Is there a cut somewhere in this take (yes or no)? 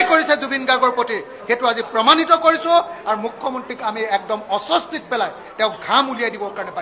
no